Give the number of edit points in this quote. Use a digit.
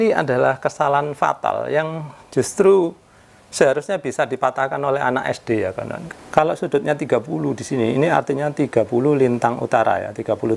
1